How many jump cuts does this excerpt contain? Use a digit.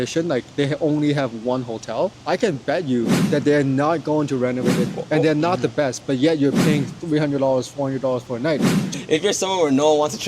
3